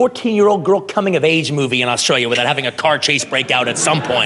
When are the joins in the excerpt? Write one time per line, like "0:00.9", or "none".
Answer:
none